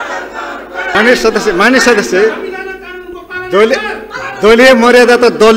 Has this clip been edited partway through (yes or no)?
yes